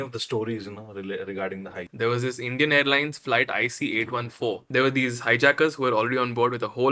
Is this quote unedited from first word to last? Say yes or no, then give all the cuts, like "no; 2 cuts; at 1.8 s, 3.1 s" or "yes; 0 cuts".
no; 2 cuts; at 1.8 s, 4.6 s